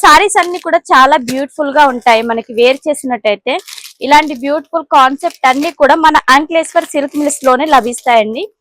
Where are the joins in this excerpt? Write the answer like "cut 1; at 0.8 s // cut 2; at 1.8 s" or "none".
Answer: none